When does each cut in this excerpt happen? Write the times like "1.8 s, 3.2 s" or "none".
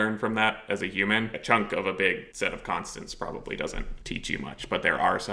1.4 s, 2.3 s, 3.9 s